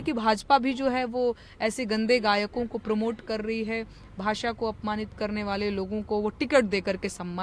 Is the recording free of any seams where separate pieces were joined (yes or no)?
yes